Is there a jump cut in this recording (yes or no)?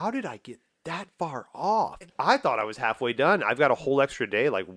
yes